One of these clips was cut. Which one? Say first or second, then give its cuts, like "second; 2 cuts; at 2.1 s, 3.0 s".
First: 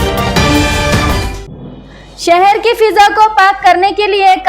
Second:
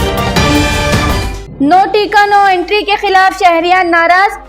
first; 1 cut; at 0.9 s